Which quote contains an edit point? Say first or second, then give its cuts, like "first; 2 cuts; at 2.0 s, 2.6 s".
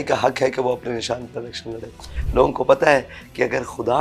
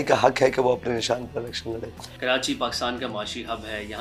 first; 1 cut; at 2.1 s